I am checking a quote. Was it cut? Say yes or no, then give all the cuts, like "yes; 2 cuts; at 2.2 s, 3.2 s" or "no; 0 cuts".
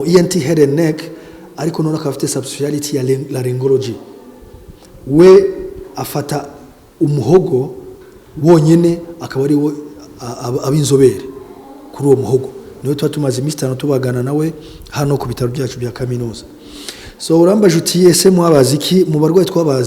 no; 0 cuts